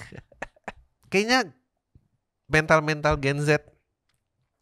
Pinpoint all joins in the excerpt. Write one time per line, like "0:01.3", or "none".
0:00.9